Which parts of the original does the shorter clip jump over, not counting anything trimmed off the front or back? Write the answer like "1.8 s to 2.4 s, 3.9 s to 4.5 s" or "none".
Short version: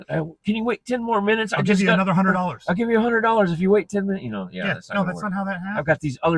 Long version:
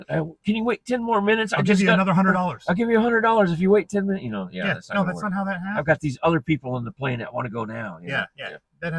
none